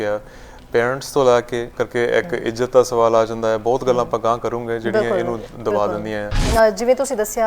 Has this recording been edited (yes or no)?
yes